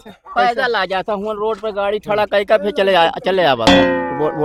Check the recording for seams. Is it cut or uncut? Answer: uncut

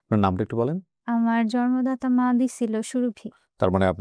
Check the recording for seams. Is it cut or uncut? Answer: cut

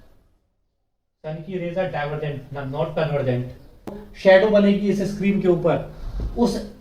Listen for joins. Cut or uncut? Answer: cut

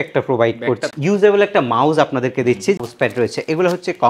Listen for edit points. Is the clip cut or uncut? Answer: cut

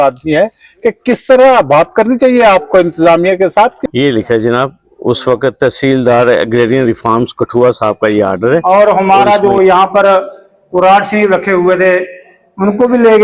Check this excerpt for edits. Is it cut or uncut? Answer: cut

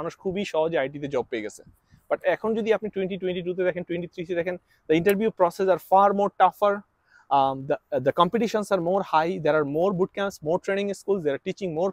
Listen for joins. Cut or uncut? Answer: uncut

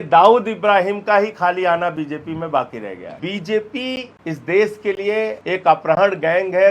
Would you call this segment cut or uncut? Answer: cut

